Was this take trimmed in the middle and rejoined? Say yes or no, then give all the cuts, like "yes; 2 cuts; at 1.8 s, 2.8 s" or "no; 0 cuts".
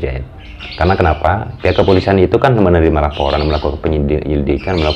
no; 0 cuts